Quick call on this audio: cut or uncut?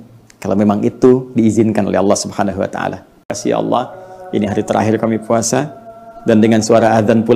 cut